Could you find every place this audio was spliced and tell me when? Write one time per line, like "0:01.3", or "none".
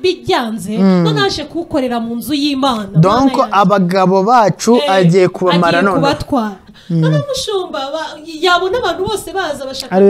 0:06.7